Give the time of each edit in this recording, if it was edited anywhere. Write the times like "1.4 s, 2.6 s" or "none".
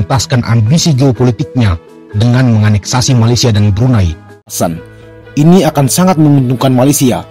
4.5 s

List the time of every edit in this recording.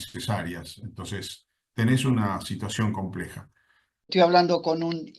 4.0 s

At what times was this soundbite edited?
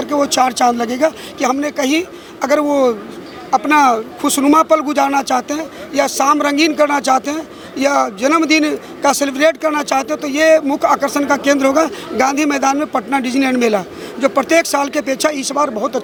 none

